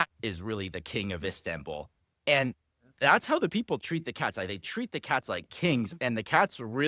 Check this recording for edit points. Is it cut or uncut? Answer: uncut